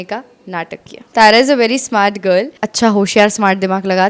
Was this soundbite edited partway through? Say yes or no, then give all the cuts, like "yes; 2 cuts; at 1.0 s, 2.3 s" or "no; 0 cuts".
yes; 2 cuts; at 1.1 s, 2.6 s